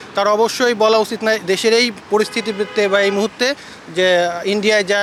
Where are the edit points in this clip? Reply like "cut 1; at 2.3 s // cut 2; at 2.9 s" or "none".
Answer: none